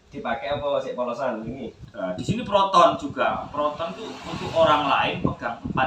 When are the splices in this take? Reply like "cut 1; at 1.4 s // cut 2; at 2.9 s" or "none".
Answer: cut 1; at 1.8 s